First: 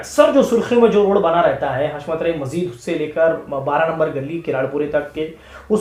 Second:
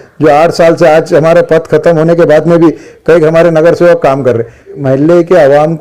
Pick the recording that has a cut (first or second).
second